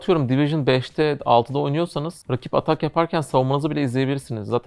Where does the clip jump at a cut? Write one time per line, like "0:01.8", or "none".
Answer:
0:02.2

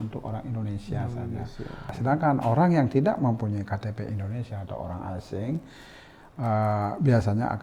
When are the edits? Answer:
0:01.9

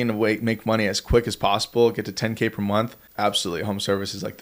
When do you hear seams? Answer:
0:03.0

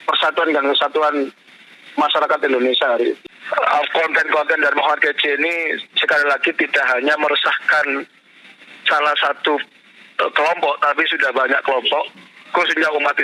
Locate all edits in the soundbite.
0:03.3

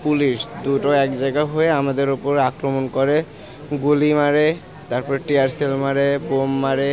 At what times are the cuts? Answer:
none

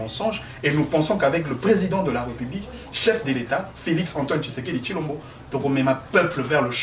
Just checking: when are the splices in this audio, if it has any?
none

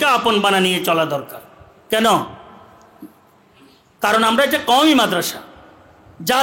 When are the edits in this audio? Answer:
none

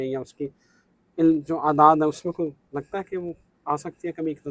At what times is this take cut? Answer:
none

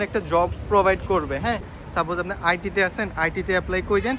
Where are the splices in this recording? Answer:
0:01.8

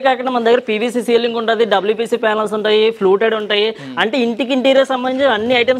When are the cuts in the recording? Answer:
none

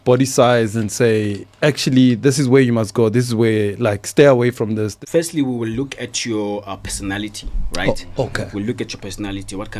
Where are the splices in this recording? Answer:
0:04.9

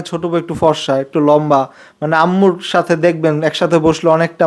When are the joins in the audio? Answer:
none

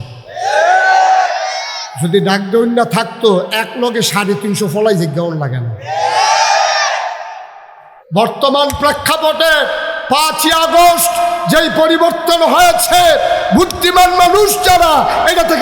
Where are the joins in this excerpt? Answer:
0:08.0

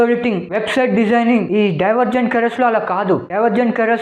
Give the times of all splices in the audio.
0:01.5

